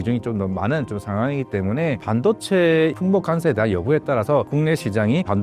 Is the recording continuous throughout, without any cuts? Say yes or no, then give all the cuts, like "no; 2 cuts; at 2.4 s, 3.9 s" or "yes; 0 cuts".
no; 3 cuts; at 2.0 s, 3.0 s, 4.5 s